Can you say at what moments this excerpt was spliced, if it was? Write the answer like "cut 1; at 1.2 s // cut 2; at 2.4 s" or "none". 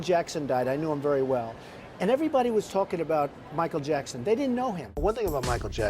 cut 1; at 4.9 s